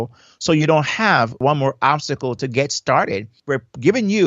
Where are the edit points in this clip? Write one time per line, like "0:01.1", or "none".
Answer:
0:01.4
0:03.4